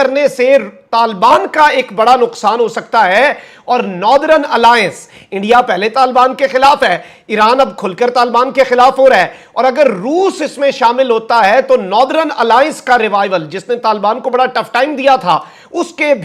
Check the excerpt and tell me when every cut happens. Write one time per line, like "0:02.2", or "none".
none